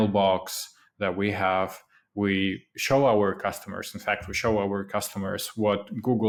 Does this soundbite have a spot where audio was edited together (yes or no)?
no